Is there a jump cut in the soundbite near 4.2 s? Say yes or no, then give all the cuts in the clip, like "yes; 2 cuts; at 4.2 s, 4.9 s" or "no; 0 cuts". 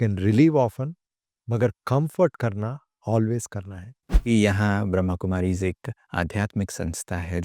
yes; 1 cut; at 4.2 s